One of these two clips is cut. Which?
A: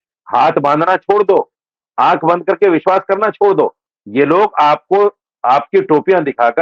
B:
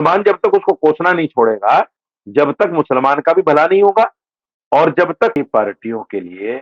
B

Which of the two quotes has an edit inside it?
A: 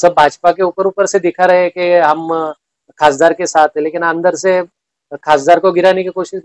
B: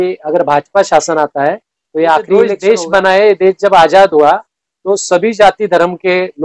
B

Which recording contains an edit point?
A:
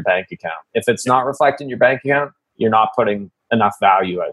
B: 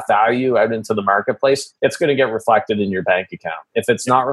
B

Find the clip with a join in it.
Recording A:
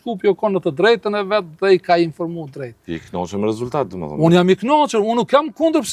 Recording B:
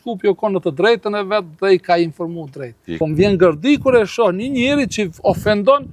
B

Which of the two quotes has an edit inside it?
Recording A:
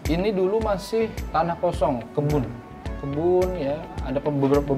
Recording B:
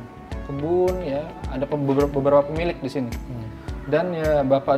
A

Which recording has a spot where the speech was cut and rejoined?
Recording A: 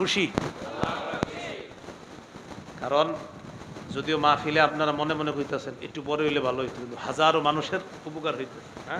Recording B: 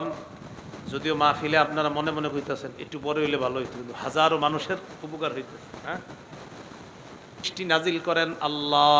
B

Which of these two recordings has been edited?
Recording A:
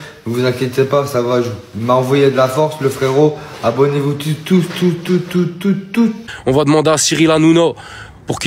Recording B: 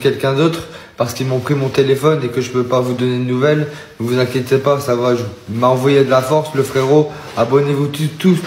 A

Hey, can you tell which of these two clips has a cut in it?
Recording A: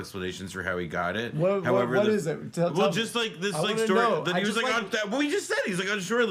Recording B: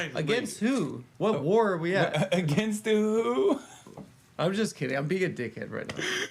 B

